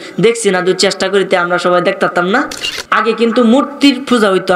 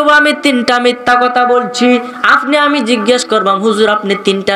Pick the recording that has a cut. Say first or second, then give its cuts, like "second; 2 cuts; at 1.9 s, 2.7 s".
first; 1 cut; at 2.6 s